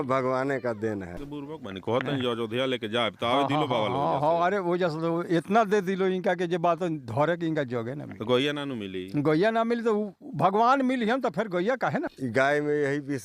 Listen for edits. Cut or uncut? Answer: cut